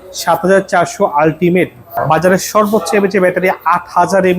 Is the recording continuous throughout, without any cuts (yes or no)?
no